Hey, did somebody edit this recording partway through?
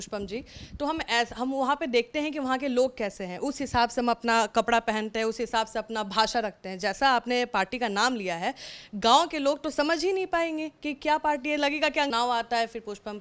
yes; 1 cut; at 12.1 s

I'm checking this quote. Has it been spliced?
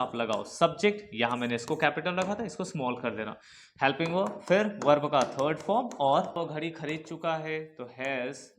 yes; 1 cut; at 6.3 s

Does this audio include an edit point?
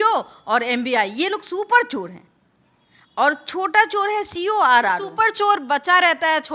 no; 0 cuts

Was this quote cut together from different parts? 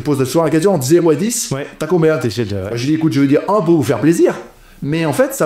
no; 0 cuts

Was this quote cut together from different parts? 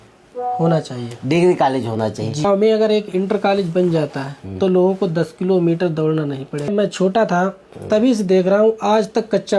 yes; 3 cuts; at 2.5 s, 6.7 s, 8.0 s

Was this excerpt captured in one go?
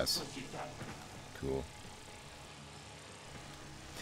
yes; 0 cuts

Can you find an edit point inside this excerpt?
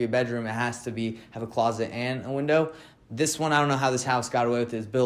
no; 0 cuts

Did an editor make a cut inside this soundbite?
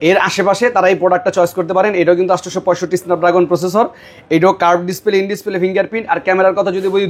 no; 0 cuts

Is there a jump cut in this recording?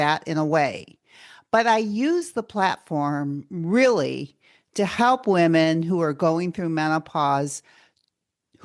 no; 0 cuts

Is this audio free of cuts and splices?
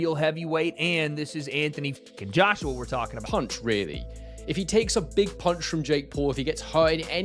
no; 1 cut; at 3.2 s

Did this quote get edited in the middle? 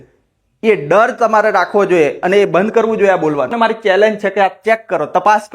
yes; 1 cut; at 3.5 s

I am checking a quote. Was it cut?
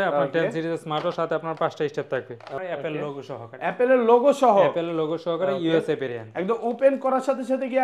yes; 1 cut; at 2.6 s

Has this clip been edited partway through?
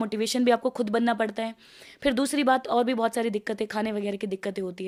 no; 0 cuts

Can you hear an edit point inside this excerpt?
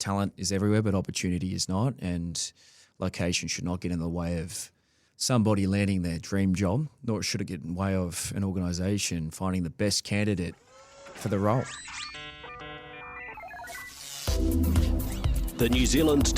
yes; 1 cut; at 11.8 s

